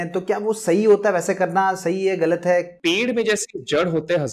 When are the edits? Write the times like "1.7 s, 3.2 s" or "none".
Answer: 2.7 s